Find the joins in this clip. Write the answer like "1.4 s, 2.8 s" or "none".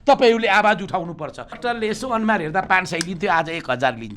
1.6 s

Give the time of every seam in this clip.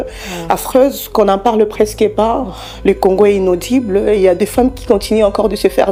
none

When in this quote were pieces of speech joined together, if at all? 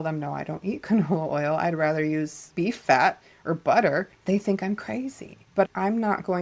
2.5 s, 5.6 s

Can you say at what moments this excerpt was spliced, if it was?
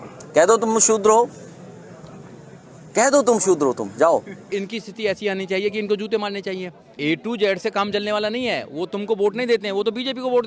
4.6 s, 6.9 s

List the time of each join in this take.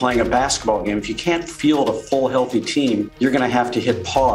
3.1 s

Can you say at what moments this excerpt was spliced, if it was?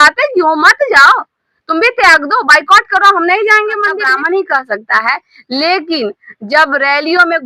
4.0 s

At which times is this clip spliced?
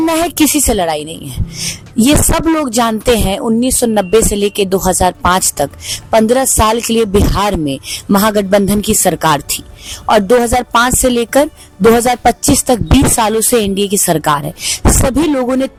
none

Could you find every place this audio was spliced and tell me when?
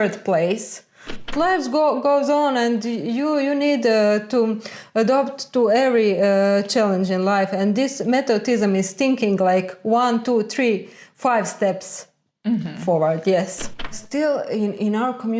1.3 s, 14.0 s

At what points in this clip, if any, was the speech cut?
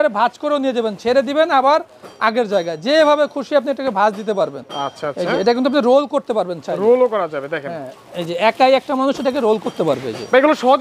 none

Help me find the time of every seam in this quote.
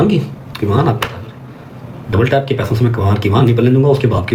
none

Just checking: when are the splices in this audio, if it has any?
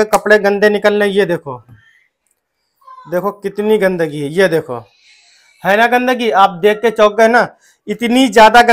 none

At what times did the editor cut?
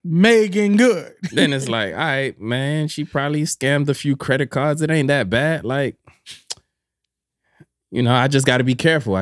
1.4 s

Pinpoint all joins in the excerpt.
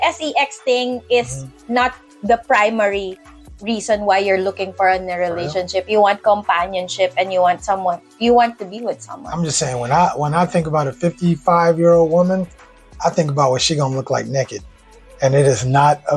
none

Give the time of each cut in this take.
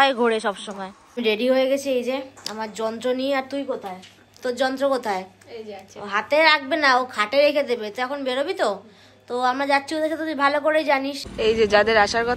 1.1 s, 11.2 s

